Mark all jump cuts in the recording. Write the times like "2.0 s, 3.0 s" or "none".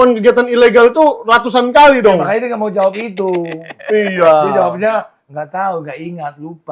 none

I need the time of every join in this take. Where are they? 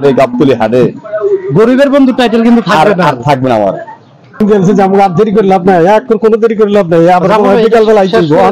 4.4 s

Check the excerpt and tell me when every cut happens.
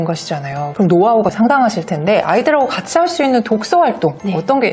1.3 s

